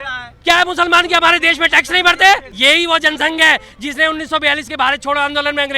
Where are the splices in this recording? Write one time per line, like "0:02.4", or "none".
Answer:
0:02.5